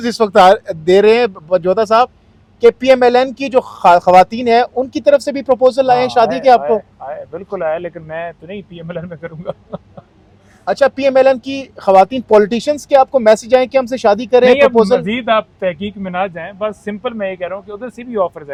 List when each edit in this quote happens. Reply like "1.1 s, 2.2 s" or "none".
none

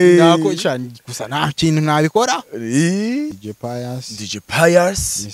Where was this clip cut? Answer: 3.3 s

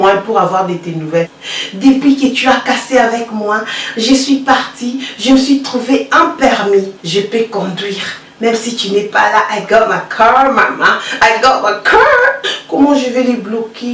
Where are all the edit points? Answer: 1.4 s, 7.0 s, 12.5 s

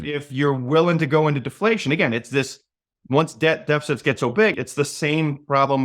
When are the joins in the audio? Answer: 4.6 s

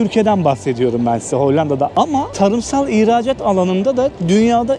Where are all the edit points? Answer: none

